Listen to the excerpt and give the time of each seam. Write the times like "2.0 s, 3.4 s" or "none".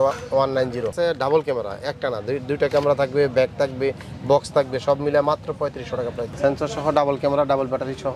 0.9 s, 6.2 s